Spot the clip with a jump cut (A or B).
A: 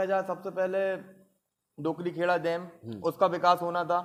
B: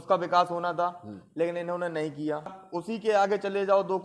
B